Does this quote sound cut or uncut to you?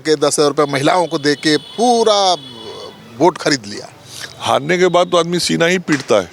uncut